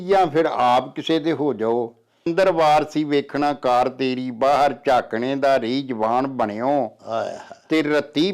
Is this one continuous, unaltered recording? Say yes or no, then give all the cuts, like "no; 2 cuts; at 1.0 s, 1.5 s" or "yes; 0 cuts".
no; 1 cut; at 2.1 s